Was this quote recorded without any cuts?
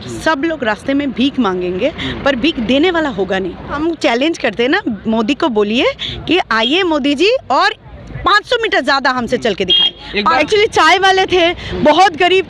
no; 2 cuts; at 3.8 s, 10.4 s

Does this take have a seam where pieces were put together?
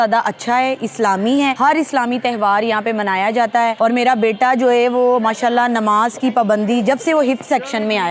no; 0 cuts

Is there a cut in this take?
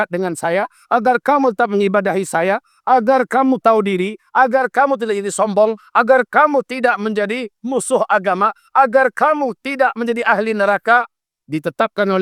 no; 0 cuts

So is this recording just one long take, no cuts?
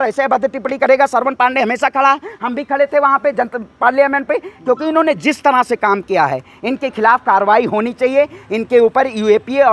yes; 0 cuts

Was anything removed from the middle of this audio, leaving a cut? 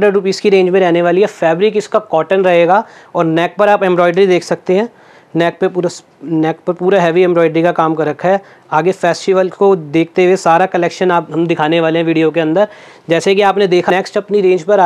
yes; 1 cut; at 13.9 s

